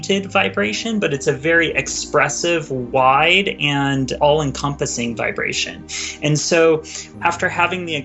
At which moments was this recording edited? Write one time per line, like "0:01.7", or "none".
0:04.1
0:07.1